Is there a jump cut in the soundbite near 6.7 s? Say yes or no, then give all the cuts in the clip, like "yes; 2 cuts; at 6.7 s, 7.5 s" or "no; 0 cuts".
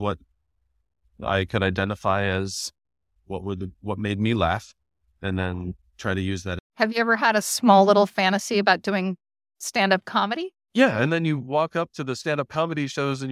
yes; 1 cut; at 6.7 s